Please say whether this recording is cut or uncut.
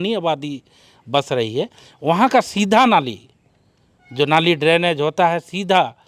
uncut